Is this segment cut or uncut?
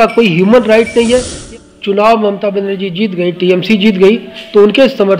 cut